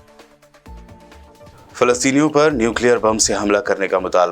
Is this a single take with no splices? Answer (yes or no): no